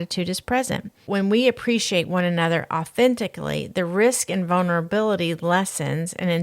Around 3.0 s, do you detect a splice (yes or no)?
no